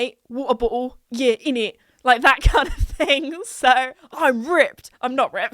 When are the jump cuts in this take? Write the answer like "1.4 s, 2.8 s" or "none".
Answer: 4.0 s

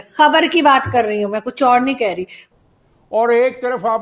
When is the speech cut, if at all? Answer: 2.4 s

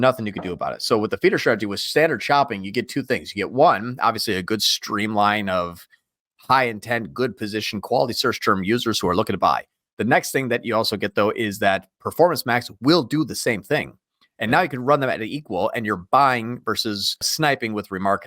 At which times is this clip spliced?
17.3 s

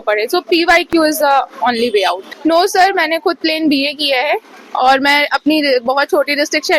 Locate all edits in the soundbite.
2.3 s

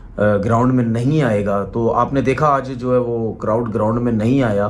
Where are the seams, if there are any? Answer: 2.4 s

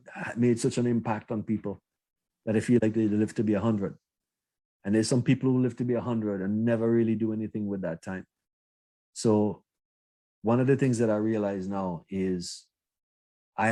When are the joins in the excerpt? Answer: none

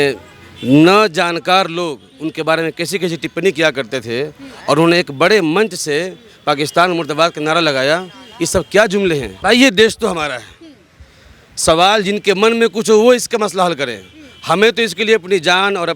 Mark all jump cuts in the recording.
9.4 s

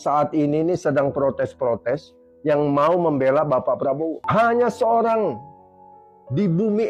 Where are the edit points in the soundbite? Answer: 4.2 s

